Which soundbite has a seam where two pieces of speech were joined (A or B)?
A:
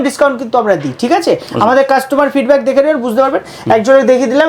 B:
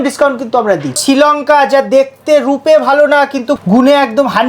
B